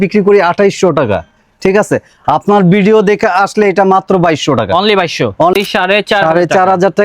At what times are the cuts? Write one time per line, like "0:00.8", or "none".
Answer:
0:05.5